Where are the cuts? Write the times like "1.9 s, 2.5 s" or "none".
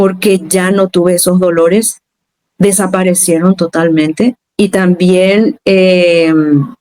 4.4 s